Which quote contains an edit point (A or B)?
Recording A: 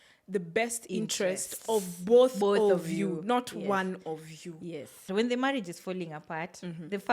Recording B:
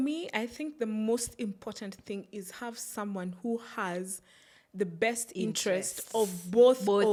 A